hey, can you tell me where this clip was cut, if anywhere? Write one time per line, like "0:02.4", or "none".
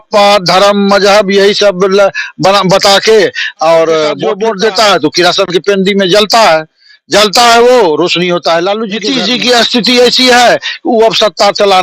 0:04.3
0:09.1